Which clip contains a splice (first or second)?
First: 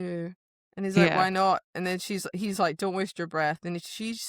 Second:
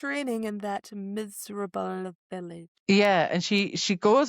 second